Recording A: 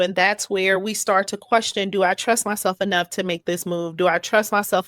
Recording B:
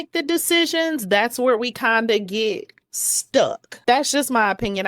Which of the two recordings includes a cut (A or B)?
B